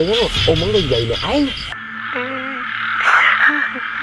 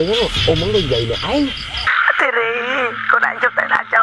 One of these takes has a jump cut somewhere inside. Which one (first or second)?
first